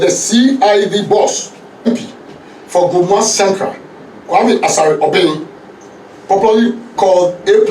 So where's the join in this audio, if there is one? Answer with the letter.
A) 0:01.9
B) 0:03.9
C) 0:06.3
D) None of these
A